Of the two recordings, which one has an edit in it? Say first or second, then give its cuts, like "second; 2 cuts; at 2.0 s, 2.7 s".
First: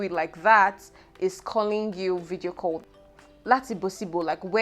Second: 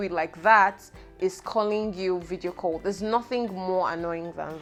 first; 1 cut; at 2.8 s